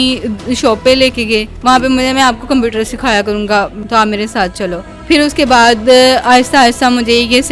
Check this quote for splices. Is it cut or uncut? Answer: cut